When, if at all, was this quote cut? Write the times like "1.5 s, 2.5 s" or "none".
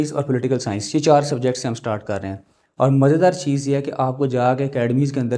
2.6 s